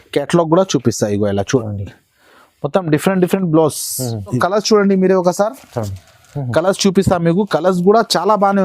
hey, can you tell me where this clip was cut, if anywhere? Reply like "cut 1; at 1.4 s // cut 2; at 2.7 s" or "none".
cut 1; at 4.4 s